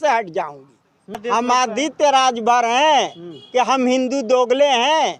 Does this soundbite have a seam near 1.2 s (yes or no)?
yes